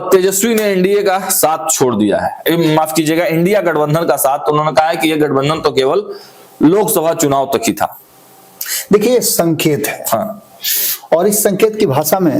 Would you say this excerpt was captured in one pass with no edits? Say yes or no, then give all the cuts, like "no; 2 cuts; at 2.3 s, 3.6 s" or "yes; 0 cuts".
yes; 0 cuts